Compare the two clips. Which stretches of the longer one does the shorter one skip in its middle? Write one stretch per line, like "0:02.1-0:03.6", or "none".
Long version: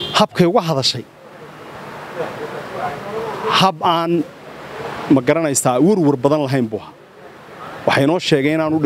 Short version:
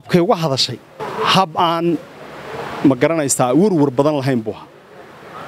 0:01.3-0:03.3